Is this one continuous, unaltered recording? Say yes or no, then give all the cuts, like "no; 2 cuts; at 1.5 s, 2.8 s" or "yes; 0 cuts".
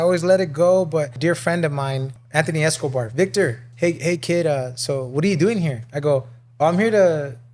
no; 3 cuts; at 1.1 s, 2.1 s, 3.6 s